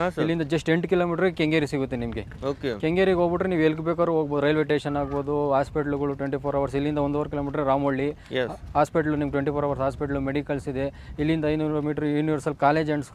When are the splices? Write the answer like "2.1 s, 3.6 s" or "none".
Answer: none